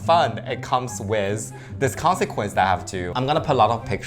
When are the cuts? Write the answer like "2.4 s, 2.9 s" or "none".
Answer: 3.1 s